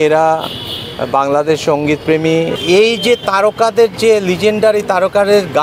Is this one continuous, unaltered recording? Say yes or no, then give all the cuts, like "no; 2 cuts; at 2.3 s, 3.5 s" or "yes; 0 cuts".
no; 1 cut; at 2.5 s